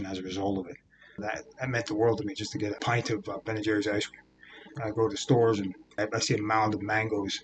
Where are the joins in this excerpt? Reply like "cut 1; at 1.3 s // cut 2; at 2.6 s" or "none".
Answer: cut 1; at 1.2 s // cut 2; at 2.8 s // cut 3; at 4.7 s // cut 4; at 6.0 s